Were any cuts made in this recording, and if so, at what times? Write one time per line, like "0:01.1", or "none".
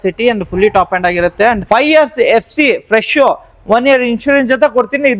0:01.6